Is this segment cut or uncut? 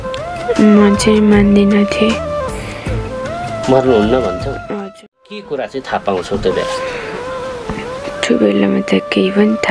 cut